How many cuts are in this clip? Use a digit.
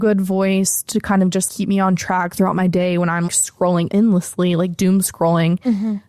2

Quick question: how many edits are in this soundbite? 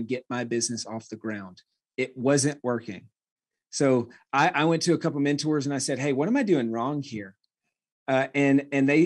0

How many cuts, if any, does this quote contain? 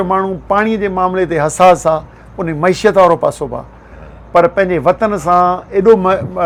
0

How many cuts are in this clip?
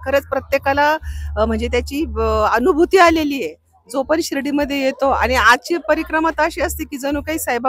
0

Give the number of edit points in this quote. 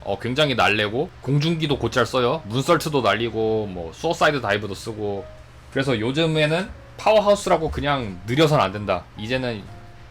1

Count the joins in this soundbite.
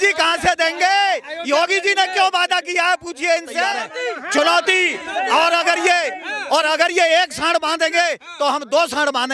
1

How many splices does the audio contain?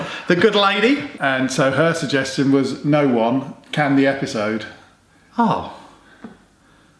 1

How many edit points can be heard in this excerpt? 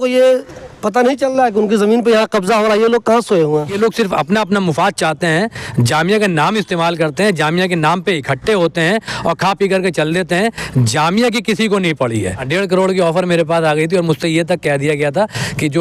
2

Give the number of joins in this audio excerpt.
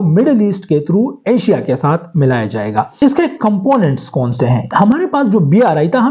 2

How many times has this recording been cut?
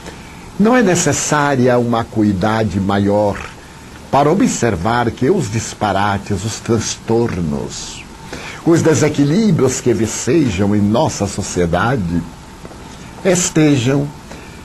0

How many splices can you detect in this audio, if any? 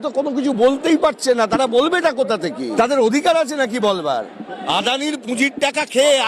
2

